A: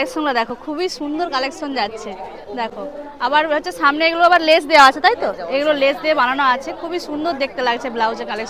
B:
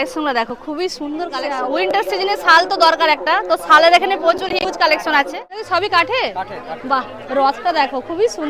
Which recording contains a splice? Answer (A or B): B